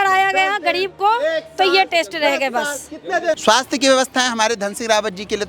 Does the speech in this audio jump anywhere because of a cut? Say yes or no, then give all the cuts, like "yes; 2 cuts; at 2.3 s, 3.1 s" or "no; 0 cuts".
yes; 1 cut; at 3.4 s